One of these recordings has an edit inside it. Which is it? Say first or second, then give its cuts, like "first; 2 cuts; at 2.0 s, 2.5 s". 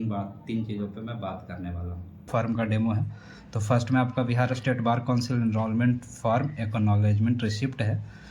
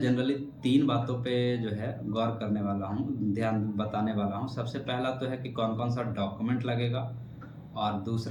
first; 1 cut; at 2.1 s